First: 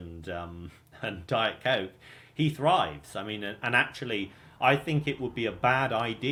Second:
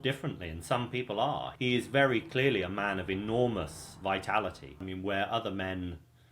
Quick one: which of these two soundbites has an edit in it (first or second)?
second